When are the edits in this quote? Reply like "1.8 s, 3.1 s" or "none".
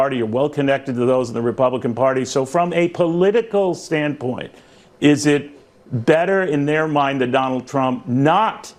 none